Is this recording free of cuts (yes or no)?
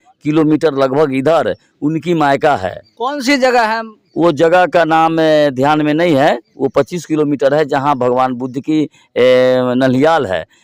yes